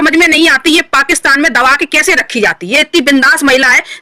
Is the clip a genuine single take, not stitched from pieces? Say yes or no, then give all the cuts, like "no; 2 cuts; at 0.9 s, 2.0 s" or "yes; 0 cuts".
yes; 0 cuts